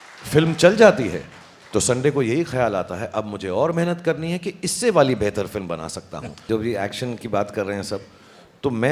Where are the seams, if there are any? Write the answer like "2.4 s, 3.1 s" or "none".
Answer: 6.4 s